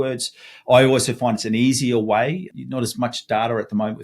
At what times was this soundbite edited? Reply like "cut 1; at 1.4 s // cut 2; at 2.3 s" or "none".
cut 1; at 2.5 s

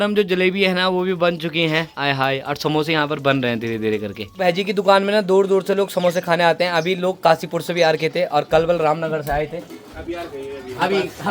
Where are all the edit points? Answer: none

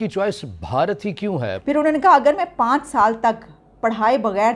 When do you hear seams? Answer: cut 1; at 1.6 s

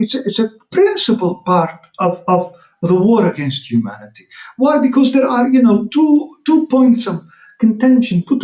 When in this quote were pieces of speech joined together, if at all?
none

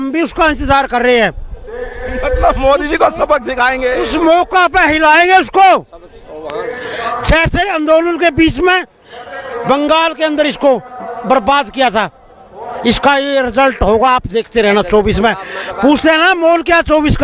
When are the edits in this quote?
none

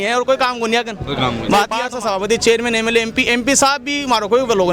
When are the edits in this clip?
cut 1; at 1.8 s

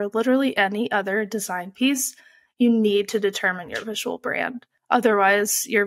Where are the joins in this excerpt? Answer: cut 1; at 4.6 s

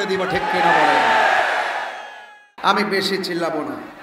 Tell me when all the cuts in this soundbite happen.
cut 1; at 2.5 s

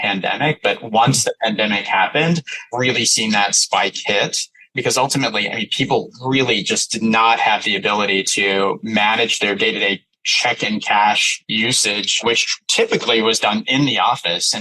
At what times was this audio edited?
cut 1; at 12.6 s

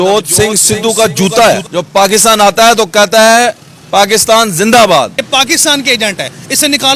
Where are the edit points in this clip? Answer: cut 1; at 1.7 s // cut 2; at 5.2 s

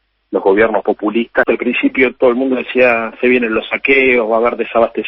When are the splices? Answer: cut 1; at 1.4 s

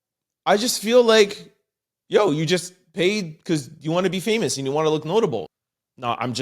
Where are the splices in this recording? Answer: cut 1; at 5.4 s

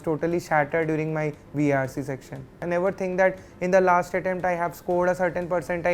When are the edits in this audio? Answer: cut 1; at 2.6 s

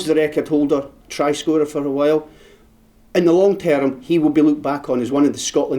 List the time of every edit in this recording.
none

